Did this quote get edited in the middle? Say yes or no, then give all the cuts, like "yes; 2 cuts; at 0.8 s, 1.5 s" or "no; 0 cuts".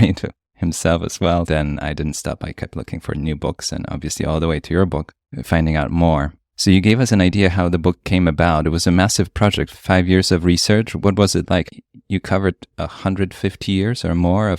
yes; 3 cuts; at 1.5 s, 9.8 s, 11.7 s